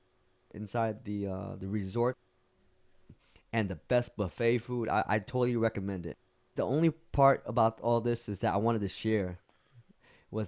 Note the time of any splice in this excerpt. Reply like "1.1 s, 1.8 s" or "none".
6.3 s